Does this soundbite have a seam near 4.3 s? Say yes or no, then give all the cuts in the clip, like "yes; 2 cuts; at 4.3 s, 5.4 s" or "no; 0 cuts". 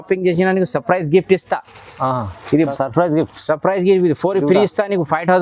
no; 1 cut; at 2.6 s